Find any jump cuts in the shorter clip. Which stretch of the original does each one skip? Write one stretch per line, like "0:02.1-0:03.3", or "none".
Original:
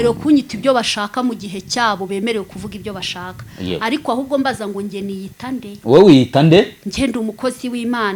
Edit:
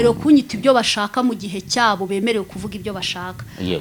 none